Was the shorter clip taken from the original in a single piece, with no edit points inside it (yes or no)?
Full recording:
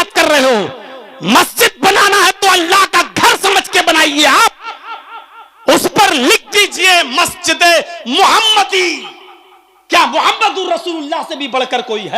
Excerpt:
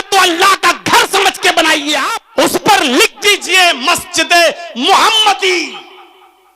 no